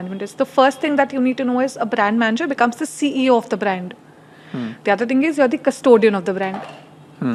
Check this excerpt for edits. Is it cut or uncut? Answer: uncut